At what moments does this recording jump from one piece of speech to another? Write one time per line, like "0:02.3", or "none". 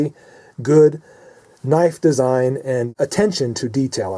0:02.9